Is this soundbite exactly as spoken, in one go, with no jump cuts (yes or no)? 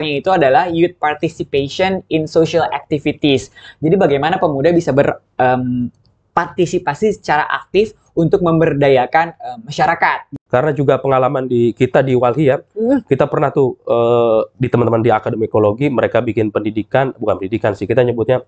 no